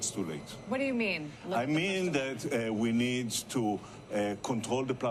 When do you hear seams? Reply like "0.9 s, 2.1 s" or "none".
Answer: none